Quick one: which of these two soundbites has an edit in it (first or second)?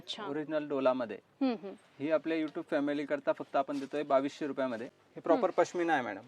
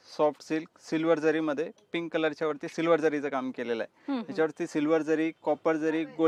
first